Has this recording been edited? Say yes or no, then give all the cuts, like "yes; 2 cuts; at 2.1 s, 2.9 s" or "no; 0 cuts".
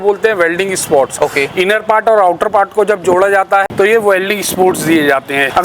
no; 0 cuts